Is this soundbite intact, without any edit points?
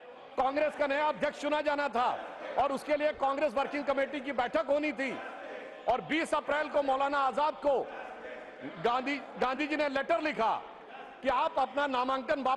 yes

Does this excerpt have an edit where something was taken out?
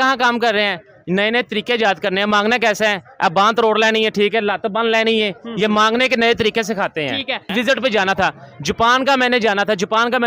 yes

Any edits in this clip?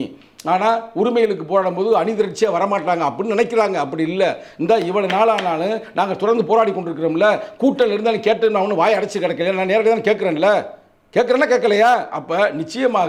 no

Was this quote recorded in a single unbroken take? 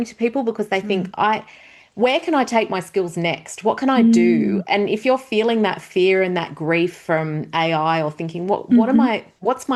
yes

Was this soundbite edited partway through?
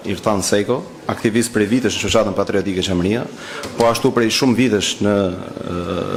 no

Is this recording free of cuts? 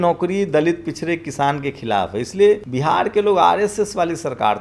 no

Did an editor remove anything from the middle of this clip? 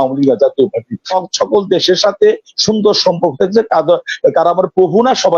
yes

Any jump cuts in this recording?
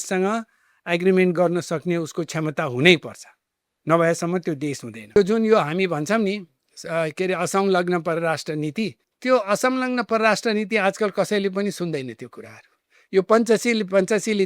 yes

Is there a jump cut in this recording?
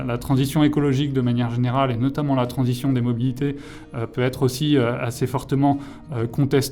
no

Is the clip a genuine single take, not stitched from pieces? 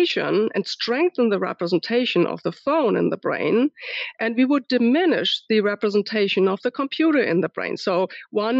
yes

